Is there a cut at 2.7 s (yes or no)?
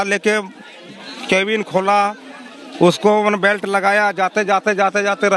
no